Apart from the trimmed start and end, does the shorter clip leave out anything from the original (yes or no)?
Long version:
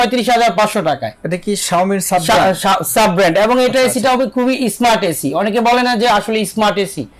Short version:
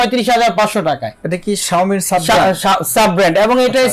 no